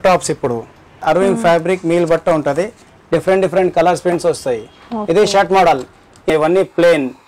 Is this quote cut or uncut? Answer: cut